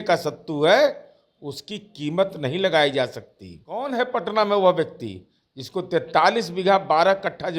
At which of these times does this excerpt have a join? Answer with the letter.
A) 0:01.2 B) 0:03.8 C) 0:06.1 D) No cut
B